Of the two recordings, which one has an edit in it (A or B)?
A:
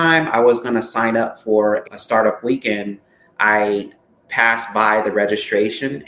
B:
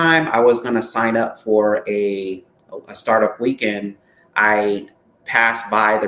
A